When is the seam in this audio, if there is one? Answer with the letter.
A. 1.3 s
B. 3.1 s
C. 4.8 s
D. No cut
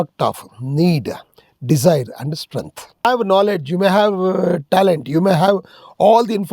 B